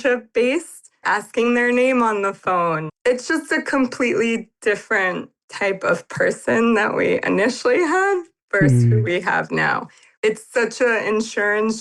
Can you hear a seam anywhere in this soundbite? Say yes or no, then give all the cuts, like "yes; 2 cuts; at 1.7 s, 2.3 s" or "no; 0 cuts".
yes; 3 cuts; at 1.0 s, 2.9 s, 10.0 s